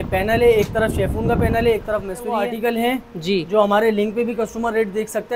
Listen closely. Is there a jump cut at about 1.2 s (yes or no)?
no